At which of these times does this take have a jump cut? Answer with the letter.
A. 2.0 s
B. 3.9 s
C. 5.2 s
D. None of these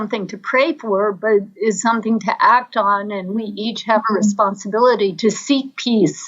C